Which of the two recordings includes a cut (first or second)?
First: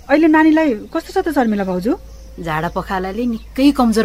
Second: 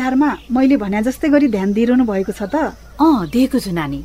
second